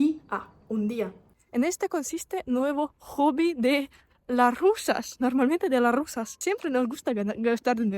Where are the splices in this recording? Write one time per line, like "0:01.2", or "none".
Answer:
0:01.3
0:06.2